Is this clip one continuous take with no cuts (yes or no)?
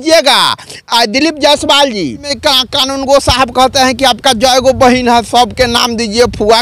no